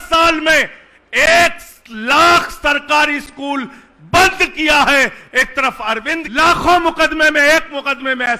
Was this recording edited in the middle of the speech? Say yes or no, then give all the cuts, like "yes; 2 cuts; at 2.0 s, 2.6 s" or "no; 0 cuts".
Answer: yes; 1 cut; at 6.2 s